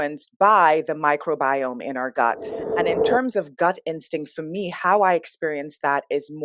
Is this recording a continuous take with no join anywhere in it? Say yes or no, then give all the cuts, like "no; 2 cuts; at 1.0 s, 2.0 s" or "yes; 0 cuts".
no; 1 cut; at 2.6 s